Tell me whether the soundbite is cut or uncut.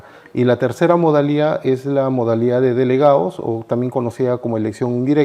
uncut